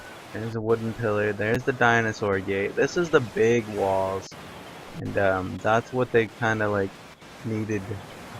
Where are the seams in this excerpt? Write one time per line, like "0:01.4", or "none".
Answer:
none